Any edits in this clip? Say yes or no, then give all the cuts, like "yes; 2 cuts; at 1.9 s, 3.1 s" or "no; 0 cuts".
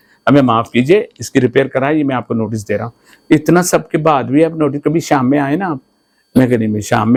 no; 0 cuts